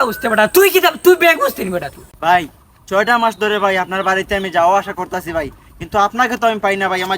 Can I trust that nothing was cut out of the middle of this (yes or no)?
no